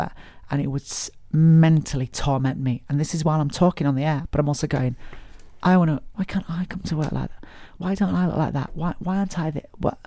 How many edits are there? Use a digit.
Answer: 3